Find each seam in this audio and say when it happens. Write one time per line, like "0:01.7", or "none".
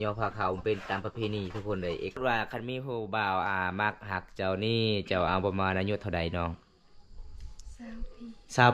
0:02.2